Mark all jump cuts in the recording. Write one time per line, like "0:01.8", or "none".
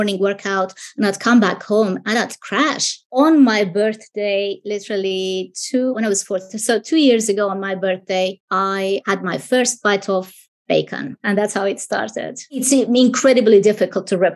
0:03.2
0:09.0
0:11.1
0:12.6